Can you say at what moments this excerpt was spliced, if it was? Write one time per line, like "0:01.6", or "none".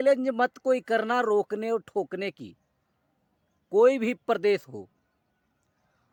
none

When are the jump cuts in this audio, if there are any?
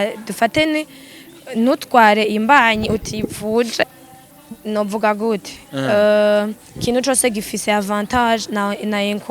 0:04.0

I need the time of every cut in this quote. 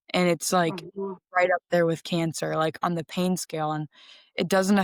none

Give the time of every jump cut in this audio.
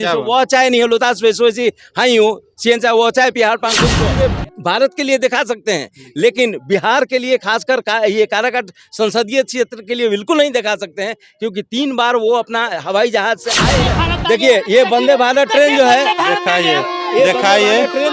0:03.9
0:13.8

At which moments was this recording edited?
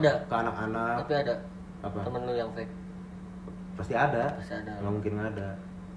none

